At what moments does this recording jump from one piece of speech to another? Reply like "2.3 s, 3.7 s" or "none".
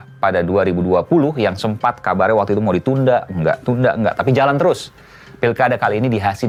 none